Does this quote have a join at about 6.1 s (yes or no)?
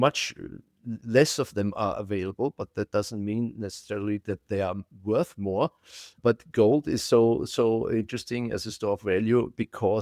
yes